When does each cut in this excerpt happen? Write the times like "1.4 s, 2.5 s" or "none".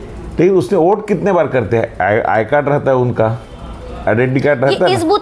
none